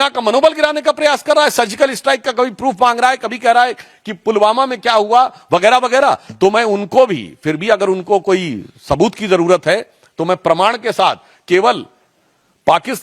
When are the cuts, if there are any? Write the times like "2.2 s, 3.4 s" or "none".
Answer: none